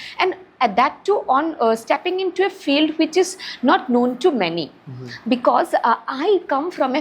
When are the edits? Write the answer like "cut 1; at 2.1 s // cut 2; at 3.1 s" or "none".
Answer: none